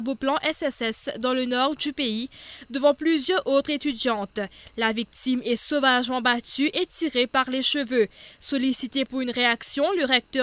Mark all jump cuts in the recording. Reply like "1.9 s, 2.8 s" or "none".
6.2 s